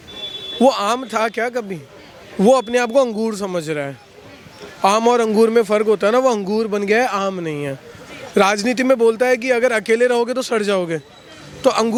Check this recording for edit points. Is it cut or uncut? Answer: uncut